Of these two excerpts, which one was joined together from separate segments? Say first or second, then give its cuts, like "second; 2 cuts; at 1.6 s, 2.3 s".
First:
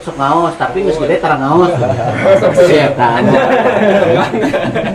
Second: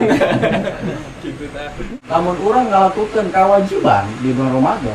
second; 1 cut; at 1.9 s